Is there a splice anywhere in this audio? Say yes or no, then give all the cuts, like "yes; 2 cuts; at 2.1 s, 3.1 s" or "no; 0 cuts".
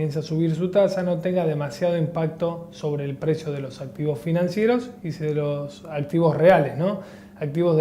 yes; 1 cut; at 5.7 s